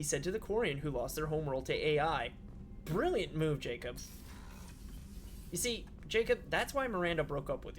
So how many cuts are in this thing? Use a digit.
1